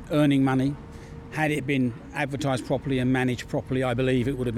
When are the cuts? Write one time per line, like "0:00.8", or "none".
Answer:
none